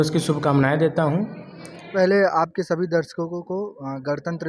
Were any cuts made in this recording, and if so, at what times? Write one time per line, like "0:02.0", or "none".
0:01.9